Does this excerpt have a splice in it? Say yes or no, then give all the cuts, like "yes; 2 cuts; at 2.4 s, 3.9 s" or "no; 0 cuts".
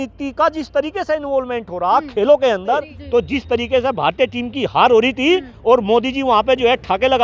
yes; 1 cut; at 2.9 s